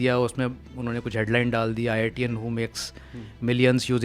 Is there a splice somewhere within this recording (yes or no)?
no